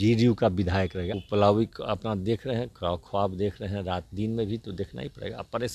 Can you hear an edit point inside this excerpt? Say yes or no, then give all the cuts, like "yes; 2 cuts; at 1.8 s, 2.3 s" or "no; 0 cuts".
yes; 1 cut; at 1.0 s